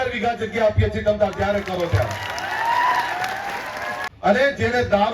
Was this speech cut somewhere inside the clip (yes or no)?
yes